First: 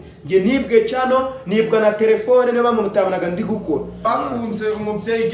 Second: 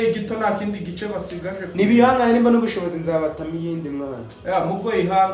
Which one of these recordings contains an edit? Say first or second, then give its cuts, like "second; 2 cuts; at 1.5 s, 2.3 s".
first; 1 cut; at 4.1 s